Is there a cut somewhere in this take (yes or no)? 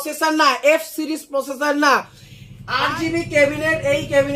yes